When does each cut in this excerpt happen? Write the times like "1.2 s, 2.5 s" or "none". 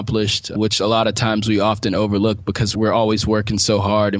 2.7 s